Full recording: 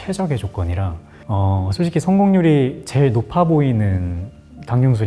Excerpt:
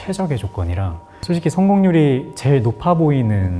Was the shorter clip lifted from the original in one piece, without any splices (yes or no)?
no